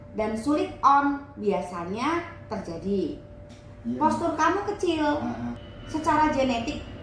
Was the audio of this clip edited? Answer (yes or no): yes